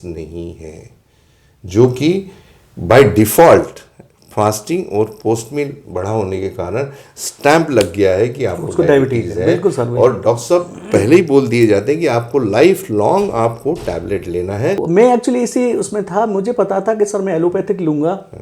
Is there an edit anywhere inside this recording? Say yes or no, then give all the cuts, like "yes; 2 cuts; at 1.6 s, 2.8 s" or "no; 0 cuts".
yes; 1 cut; at 14.8 s